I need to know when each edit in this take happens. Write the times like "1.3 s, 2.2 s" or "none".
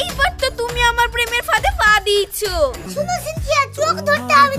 2.8 s